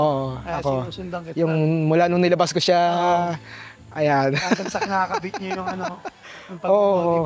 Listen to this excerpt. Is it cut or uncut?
uncut